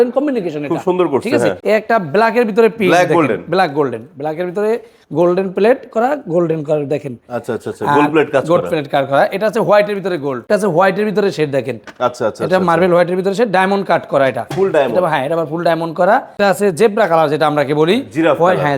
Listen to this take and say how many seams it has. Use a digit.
3